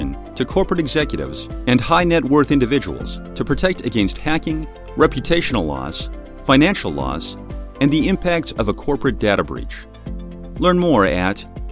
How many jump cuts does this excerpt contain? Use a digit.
0